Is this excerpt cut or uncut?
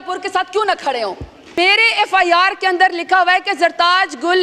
cut